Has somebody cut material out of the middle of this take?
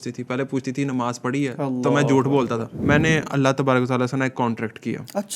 yes; 1 cut; at 2.7 s

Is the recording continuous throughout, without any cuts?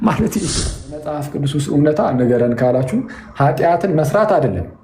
no; 1 cut; at 0.9 s

